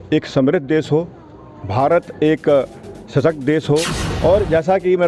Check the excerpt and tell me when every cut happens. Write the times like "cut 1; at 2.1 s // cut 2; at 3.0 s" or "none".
cut 1; at 4.0 s